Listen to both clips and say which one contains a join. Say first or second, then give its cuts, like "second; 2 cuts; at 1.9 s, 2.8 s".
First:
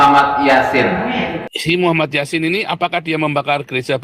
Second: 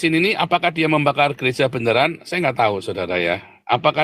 first; 1 cut; at 1.0 s